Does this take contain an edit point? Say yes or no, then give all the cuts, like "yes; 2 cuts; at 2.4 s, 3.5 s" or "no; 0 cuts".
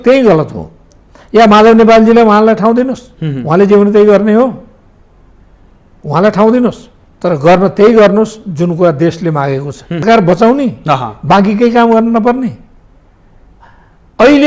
yes; 1 cut; at 10.0 s